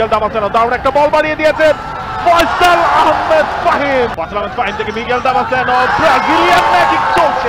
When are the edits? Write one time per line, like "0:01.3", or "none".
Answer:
0:04.1